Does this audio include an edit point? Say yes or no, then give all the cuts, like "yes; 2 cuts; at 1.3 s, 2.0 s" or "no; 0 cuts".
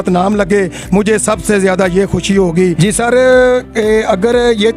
yes; 1 cut; at 2.6 s